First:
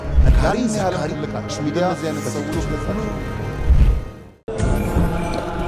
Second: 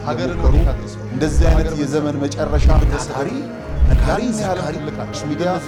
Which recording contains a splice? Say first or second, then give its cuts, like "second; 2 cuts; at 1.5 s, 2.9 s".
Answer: first; 1 cut; at 4.3 s